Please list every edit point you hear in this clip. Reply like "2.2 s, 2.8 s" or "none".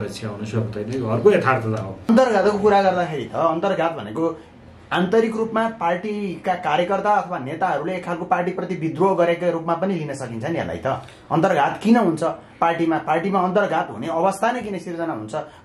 2.1 s